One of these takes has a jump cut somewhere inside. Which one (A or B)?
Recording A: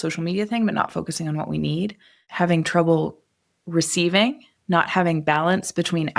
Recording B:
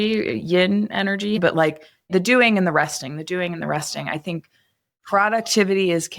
B